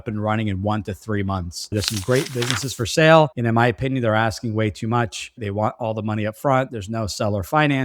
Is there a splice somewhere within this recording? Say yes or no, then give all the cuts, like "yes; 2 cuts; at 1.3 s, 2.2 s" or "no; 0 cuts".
yes; 1 cut; at 1.7 s